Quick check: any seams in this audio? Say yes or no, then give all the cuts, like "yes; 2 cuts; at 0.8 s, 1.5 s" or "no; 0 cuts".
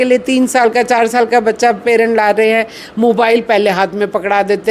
no; 0 cuts